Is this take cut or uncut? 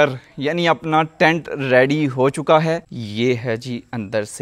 cut